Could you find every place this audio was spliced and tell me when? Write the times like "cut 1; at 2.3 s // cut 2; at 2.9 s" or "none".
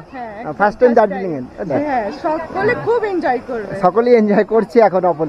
cut 1; at 1.7 s